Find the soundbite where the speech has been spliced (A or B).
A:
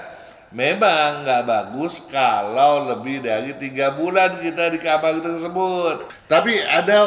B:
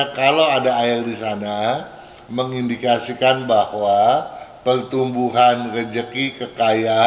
A